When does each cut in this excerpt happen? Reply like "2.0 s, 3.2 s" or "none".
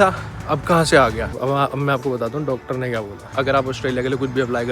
1.3 s, 3.2 s